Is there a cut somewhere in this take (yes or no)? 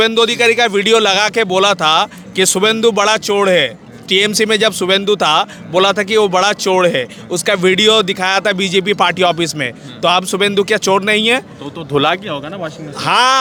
no